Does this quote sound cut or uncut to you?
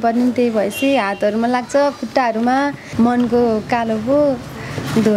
cut